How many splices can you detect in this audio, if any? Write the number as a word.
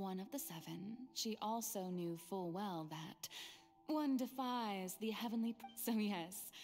one